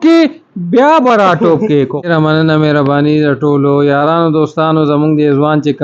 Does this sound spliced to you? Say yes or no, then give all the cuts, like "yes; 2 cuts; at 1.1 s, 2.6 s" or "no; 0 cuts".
yes; 1 cut; at 2.1 s